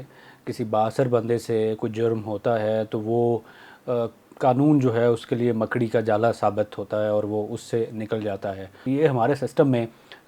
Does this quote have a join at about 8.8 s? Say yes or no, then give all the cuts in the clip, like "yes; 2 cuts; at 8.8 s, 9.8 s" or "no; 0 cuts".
yes; 1 cut; at 8.8 s